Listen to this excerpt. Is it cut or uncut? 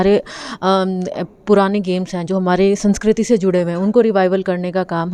uncut